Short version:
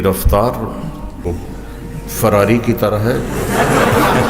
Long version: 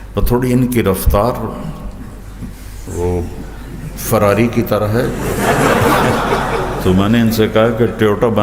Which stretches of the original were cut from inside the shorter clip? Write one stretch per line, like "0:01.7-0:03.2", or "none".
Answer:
0:02.1-0:03.1